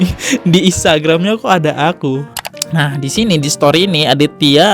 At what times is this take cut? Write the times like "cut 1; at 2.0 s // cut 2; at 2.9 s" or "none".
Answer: cut 1; at 2.3 s